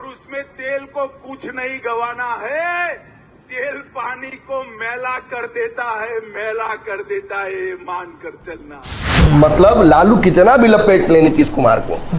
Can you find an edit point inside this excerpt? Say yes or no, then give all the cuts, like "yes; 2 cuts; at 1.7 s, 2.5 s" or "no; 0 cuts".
yes; 1 cut; at 9.1 s